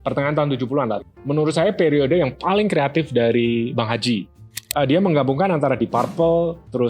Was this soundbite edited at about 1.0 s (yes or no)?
yes